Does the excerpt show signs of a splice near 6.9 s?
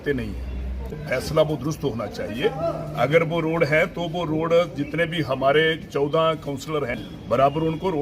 yes; 2 cuts; at 0.9 s, 6.9 s

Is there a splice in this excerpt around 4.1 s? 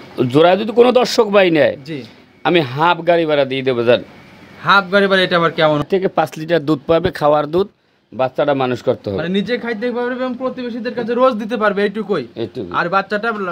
no; 1 cut; at 5.8 s

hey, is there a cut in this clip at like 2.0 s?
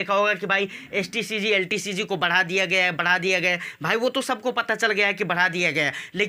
no; 0 cuts

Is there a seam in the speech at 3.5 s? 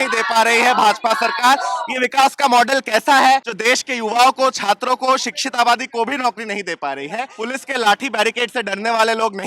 yes; 2 cuts; at 3.5 s, 7.3 s

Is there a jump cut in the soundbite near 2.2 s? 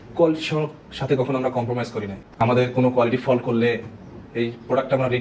yes; 1 cut; at 2.2 s

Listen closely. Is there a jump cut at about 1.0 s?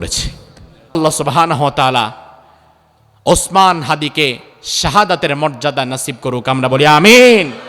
yes; 1 cut; at 1.0 s

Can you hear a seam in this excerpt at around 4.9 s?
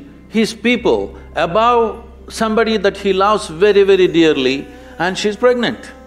no; 0 cuts

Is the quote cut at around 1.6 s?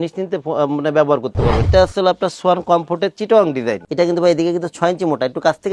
yes; 1 cut; at 1.6 s

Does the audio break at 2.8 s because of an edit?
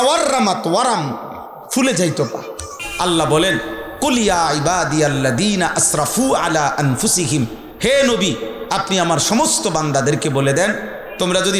yes; 1 cut; at 2.8 s

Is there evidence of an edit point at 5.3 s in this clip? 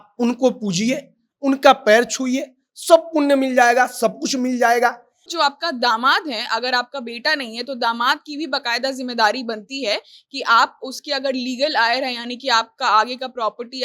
yes; 1 cut; at 5.3 s

